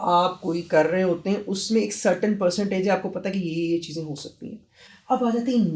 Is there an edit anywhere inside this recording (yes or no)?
no